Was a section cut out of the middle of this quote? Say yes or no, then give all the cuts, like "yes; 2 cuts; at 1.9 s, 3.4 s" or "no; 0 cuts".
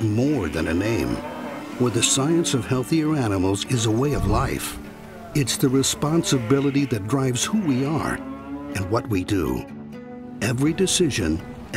no; 0 cuts